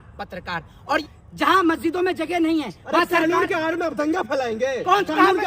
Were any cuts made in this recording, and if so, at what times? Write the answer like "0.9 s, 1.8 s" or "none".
1.0 s